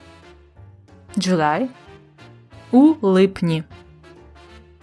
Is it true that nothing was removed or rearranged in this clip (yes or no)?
no